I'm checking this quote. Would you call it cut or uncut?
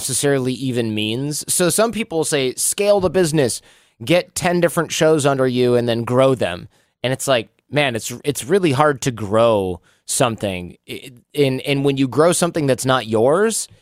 uncut